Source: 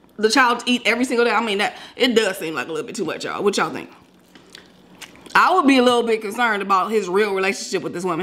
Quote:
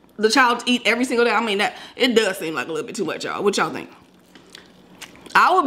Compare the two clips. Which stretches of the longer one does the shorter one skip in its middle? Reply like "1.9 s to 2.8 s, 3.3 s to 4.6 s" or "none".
none